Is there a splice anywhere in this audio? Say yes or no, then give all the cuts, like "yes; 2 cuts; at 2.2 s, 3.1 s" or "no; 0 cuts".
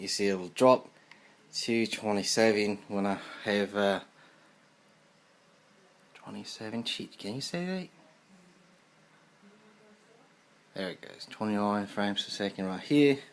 yes; 1 cut; at 2.3 s